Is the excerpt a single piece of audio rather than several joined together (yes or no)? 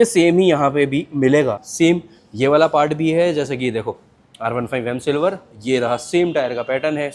no